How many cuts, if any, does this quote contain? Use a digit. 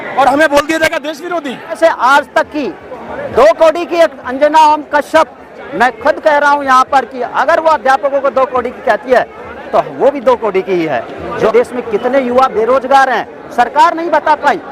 2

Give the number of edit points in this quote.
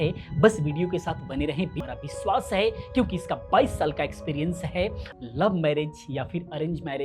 2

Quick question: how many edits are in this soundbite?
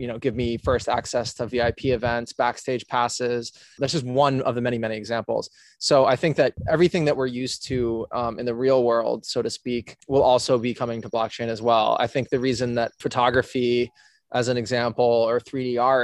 4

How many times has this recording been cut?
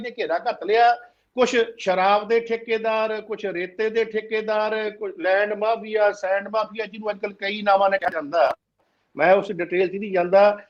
0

